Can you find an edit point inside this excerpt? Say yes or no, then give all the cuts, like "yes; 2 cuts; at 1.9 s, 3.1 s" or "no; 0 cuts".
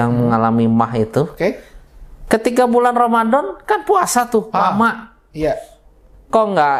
no; 0 cuts